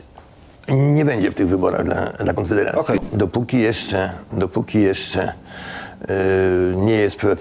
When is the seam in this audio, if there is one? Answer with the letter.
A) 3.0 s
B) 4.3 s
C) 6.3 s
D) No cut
A